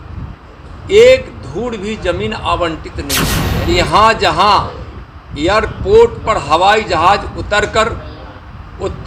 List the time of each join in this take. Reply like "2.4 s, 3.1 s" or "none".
3.4 s